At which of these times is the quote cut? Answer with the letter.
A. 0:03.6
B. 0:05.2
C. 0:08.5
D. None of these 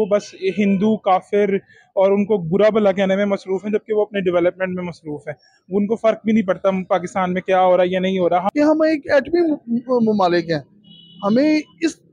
C